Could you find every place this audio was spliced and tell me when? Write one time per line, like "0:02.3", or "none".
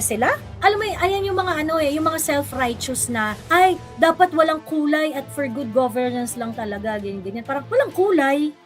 0:07.7